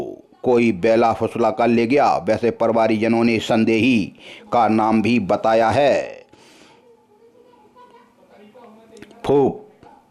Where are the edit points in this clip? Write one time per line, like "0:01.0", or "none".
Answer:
none